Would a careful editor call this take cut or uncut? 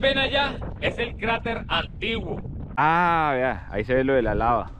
cut